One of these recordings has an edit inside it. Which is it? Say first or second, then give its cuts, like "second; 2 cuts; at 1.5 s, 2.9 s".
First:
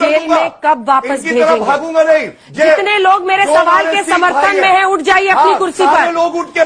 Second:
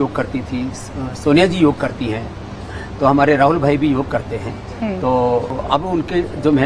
second; 1 cut; at 5.6 s